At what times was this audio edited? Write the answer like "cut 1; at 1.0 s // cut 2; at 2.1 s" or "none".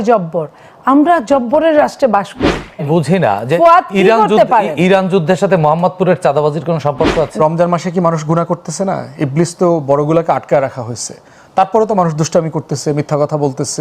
cut 1; at 2.8 s // cut 2; at 7.3 s